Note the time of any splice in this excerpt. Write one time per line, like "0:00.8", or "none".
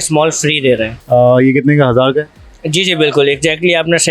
0:01.0